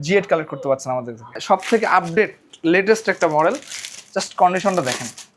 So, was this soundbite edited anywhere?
yes; 1 cut; at 1.4 s

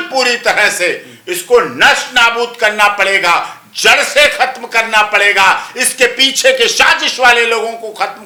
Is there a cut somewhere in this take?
no; 0 cuts

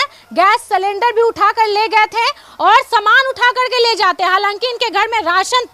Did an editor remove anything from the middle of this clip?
no; 0 cuts

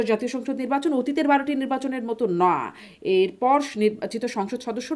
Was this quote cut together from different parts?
no; 0 cuts

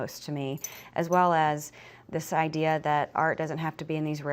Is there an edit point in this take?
no; 0 cuts

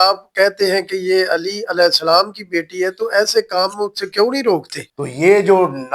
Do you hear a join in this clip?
yes; 1 cut; at 4.9 s

